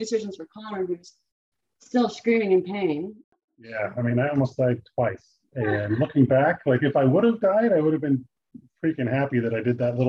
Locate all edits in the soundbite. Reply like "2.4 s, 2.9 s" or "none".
3.4 s